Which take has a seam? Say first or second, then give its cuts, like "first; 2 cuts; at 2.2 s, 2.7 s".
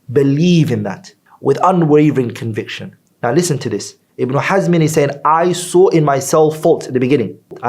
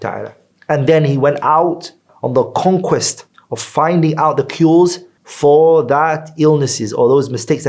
first; 1 cut; at 3.0 s